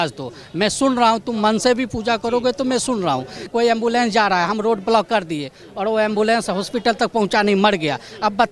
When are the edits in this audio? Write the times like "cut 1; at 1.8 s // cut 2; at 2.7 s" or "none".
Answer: cut 1; at 3.4 s